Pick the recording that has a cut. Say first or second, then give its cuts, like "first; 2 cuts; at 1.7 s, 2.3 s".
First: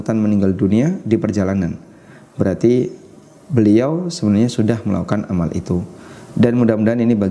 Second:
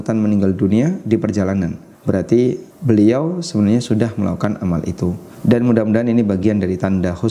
second; 3 cuts; at 1.9 s, 2.7 s, 5.3 s